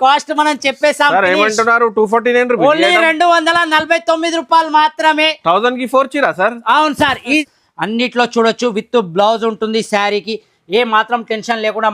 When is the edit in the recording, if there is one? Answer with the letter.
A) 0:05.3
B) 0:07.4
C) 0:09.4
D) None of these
B